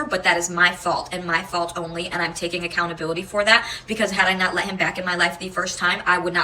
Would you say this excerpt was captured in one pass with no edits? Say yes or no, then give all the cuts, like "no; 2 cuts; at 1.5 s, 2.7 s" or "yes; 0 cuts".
yes; 0 cuts